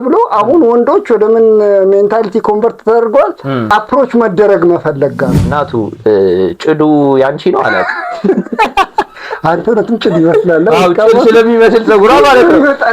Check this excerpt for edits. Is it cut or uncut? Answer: cut